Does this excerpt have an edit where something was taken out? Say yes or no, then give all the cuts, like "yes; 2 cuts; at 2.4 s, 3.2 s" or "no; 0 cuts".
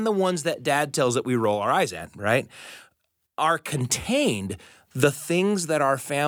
no; 0 cuts